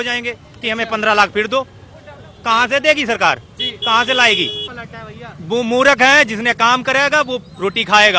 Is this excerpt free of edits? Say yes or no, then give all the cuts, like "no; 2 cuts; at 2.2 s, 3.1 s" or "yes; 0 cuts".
yes; 0 cuts